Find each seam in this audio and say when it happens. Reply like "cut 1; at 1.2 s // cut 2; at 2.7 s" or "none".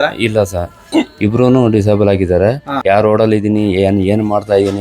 cut 1; at 2.8 s